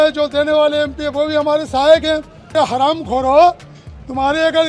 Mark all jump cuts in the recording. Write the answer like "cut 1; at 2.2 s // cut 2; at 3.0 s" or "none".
cut 1; at 2.4 s